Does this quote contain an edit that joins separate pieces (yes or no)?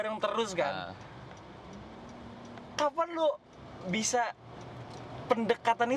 no